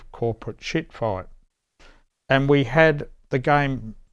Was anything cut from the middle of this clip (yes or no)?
no